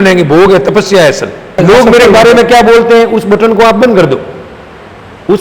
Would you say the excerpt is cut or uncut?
cut